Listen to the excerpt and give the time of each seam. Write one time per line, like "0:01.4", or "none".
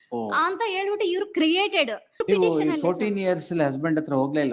0:02.2